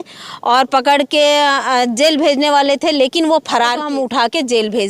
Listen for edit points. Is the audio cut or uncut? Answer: cut